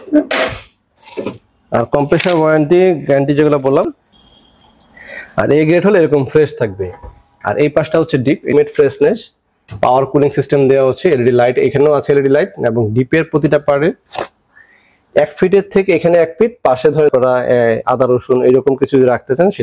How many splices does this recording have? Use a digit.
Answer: 3